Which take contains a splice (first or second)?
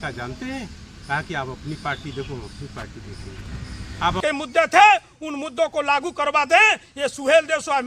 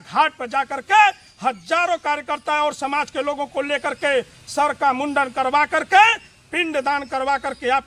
first